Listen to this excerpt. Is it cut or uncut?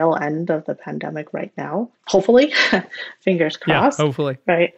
cut